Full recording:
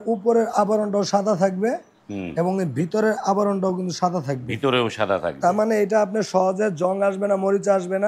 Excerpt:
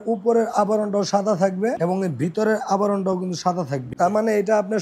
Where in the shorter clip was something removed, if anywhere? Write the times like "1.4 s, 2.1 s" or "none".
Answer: 1.8 s, 3.9 s